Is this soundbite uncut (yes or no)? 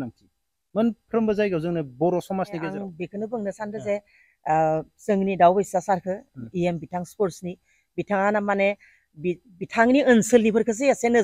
no